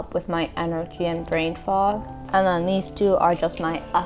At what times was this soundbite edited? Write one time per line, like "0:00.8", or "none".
0:02.1